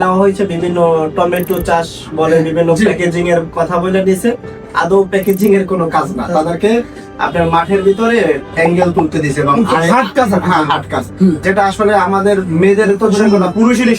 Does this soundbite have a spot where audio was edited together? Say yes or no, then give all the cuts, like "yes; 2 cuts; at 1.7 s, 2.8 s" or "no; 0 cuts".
no; 0 cuts